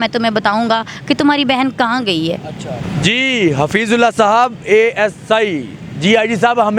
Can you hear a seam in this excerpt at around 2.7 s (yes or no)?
yes